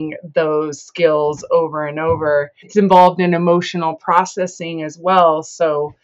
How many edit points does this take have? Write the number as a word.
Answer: one